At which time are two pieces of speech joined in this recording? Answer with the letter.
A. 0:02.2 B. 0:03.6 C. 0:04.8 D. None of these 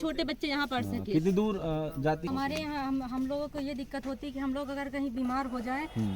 A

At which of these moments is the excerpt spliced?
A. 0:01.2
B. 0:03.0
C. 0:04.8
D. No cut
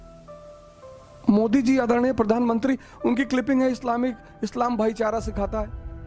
A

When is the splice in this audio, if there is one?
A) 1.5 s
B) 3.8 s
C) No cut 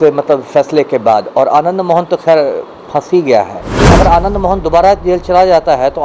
B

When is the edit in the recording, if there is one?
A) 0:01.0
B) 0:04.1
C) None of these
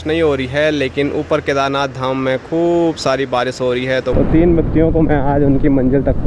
B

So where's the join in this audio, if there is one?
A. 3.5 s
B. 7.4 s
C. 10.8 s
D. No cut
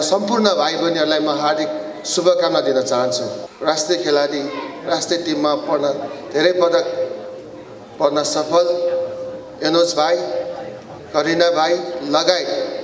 A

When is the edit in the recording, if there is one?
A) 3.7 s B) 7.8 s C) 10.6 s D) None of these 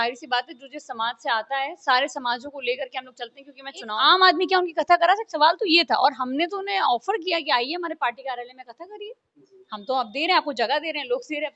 A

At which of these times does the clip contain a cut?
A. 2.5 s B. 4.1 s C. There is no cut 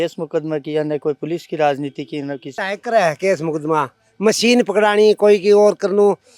A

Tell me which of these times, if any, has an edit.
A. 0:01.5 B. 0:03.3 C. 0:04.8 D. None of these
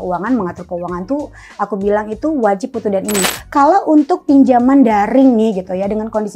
B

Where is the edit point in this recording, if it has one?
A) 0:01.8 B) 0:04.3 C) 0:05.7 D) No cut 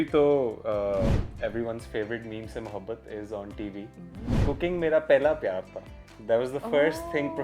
B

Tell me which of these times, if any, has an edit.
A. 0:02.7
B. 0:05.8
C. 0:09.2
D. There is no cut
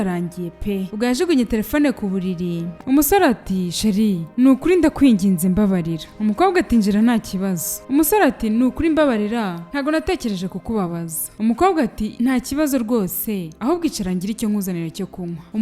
A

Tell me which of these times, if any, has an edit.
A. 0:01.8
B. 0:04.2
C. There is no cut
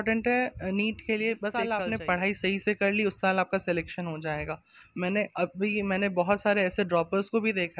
A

